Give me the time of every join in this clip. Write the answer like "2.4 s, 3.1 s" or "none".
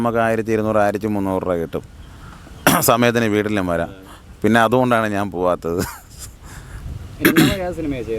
none